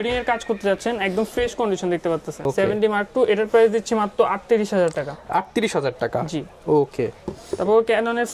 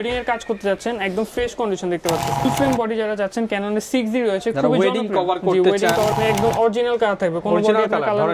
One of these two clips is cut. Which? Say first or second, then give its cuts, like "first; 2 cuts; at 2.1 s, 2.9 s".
second; 2 cuts; at 2.5 s, 6.1 s